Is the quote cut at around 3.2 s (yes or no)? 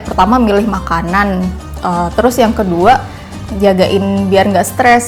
no